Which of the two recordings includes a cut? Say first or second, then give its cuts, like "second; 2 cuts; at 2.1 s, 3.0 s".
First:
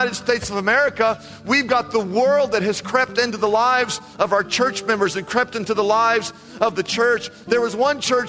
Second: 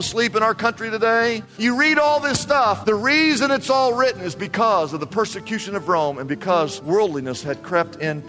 second; 3 cuts; at 1.5 s, 2.8 s, 6.8 s